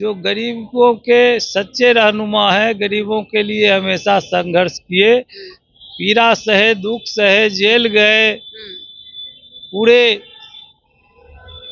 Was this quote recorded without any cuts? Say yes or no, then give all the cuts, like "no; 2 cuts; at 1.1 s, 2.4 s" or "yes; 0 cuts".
yes; 0 cuts